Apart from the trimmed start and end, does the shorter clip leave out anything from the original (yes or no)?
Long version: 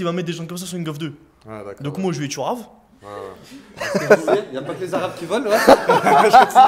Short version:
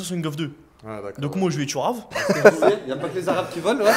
yes